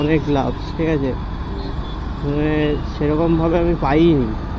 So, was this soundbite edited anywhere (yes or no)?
no